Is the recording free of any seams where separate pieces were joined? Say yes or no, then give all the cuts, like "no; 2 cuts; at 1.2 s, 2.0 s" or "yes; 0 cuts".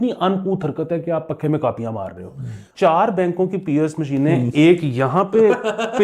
no; 1 cut; at 2.6 s